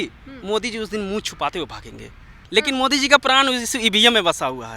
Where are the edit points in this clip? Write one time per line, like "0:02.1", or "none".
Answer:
0:02.4

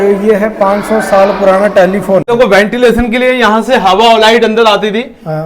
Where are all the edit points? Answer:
0:02.3

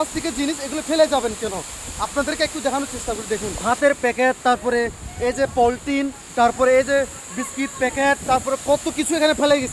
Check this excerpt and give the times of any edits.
0:03.5

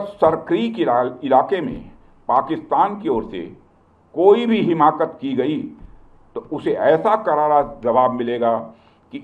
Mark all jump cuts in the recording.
none

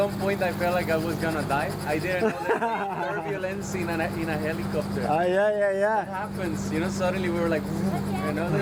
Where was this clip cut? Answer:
none

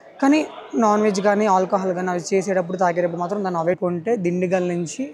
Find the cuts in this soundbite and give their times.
0:03.8

